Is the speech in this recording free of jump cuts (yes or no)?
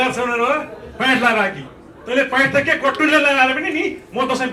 yes